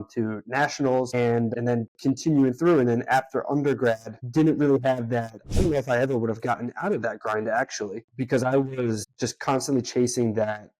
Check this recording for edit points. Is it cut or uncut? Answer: cut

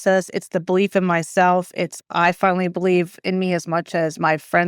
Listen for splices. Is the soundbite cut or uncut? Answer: uncut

